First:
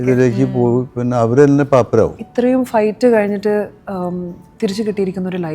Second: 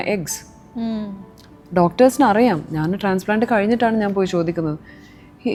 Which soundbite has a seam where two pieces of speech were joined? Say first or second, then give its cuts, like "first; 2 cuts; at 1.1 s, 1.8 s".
first; 1 cut; at 2.2 s